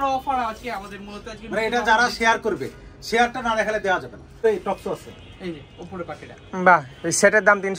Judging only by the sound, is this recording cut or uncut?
cut